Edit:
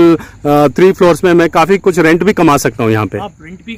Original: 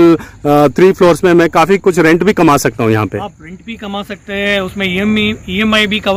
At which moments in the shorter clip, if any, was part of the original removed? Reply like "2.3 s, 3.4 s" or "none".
none